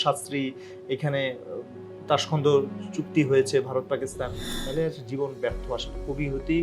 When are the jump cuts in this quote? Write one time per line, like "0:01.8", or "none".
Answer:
0:04.5